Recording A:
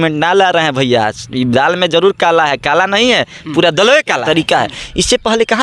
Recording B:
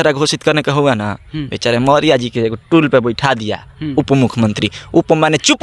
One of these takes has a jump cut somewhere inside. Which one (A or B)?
A